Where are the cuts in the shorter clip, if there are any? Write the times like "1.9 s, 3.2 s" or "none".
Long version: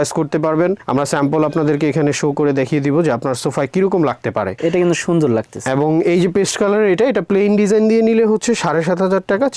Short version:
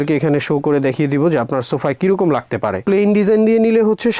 2.8 s